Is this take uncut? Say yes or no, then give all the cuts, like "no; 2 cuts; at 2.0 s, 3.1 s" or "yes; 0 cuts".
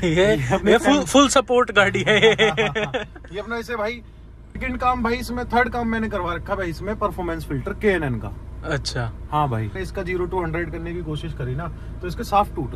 no; 2 cuts; at 4.6 s, 9.7 s